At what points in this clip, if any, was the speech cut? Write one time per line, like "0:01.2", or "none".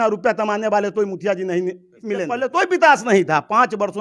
0:02.4